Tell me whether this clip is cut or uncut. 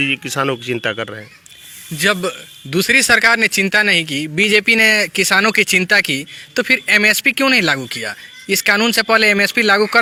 uncut